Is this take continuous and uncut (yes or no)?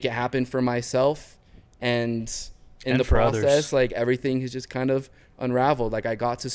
yes